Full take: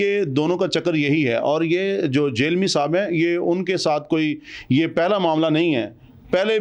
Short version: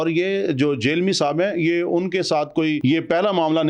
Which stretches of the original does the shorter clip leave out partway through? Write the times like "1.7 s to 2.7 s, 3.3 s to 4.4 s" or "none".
4.3 s to 4.7 s